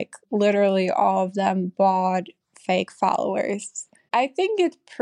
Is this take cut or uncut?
cut